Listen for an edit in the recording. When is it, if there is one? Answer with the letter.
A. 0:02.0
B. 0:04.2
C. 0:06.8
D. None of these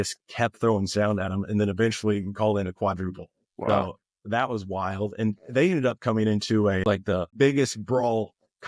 C